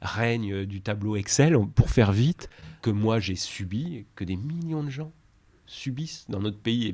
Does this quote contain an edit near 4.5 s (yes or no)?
no